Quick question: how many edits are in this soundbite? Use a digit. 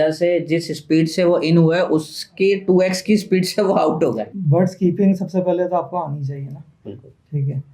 1